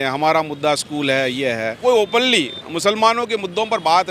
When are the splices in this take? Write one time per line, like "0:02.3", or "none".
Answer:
0:01.8